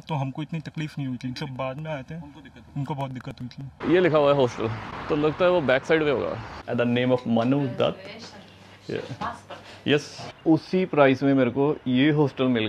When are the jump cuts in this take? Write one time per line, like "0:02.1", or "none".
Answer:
0:03.8
0:06.6
0:10.3